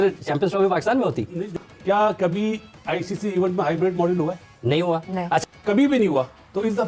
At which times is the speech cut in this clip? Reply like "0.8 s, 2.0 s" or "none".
1.4 s